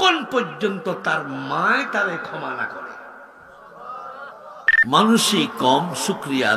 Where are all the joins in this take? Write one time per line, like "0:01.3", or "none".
0:04.6